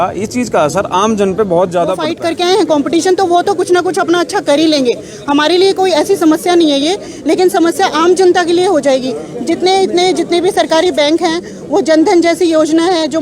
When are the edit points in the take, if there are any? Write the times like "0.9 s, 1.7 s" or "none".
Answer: 2.1 s

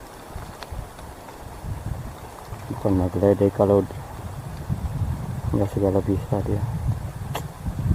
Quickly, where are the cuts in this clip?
none

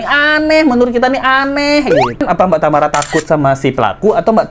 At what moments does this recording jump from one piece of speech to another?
2.2 s

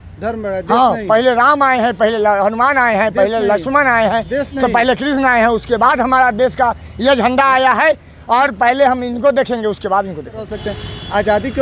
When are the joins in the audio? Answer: 10.5 s

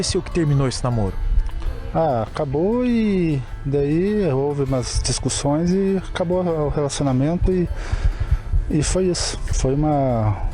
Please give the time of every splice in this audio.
9.6 s

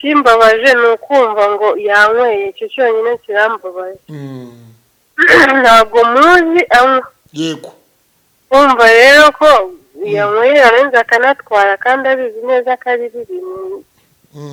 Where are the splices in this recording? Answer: none

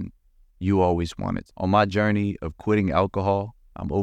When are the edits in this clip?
1.5 s

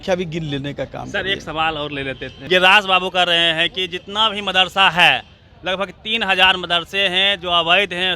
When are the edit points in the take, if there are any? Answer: none

